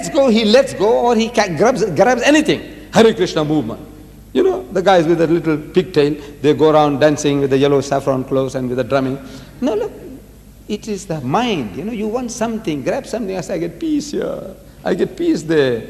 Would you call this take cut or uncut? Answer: uncut